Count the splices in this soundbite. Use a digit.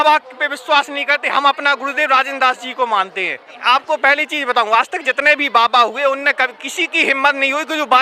1